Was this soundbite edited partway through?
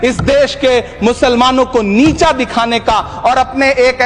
no; 0 cuts

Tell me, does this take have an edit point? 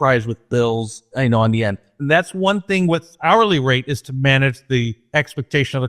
yes; 3 cuts; at 1.1 s, 1.9 s, 3.1 s

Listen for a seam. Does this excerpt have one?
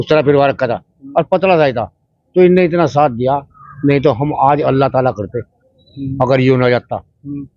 no; 0 cuts

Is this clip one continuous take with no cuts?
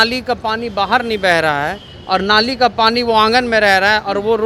yes; 0 cuts

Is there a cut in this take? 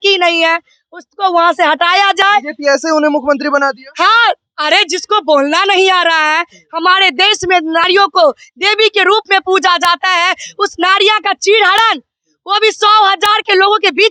no; 0 cuts

